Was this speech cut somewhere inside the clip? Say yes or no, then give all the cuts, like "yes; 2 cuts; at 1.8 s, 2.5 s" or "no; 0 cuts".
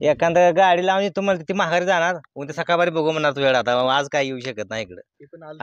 no; 0 cuts